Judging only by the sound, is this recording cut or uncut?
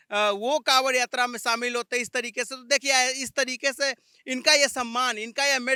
uncut